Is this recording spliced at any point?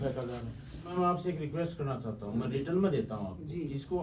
yes; 1 cut; at 0.9 s

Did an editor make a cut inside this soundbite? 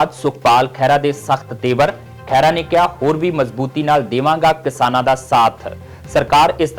no; 0 cuts

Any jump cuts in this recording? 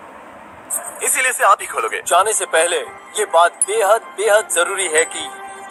no; 0 cuts

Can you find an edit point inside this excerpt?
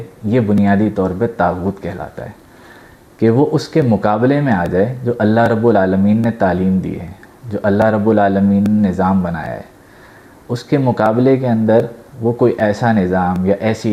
no; 0 cuts

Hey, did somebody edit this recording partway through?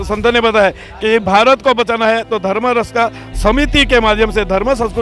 no; 0 cuts

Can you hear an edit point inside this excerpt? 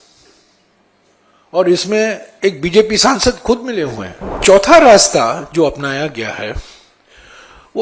yes; 1 cut; at 4.4 s

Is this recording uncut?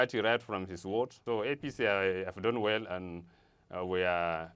no; 1 cut; at 1.2 s

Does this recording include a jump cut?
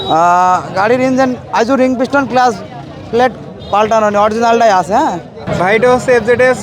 yes; 1 cut; at 5.5 s

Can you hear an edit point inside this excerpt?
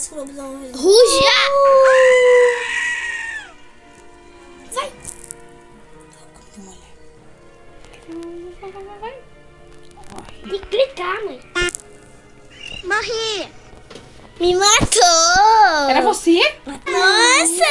yes; 1 cut; at 16.8 s

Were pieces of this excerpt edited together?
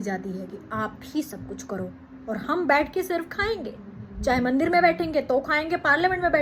no; 0 cuts

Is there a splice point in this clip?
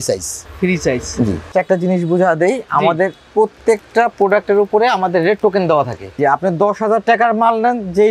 yes; 2 cuts; at 1.5 s, 6.2 s

